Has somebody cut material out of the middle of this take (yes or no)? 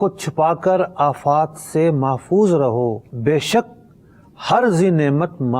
yes